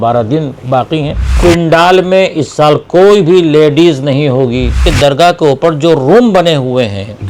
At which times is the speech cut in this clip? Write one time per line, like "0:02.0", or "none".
0:01.3
0:04.9